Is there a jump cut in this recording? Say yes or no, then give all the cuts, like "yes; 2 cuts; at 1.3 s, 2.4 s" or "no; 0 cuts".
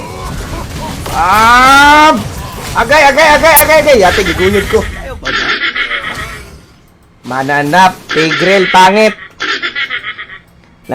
yes; 1 cut; at 3.6 s